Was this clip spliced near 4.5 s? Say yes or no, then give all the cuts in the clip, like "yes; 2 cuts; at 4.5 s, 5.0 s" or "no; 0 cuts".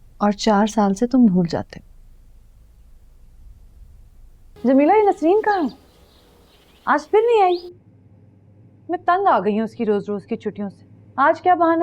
yes; 1 cut; at 4.5 s